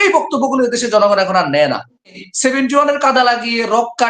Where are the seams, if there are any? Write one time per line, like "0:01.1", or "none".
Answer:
0:02.2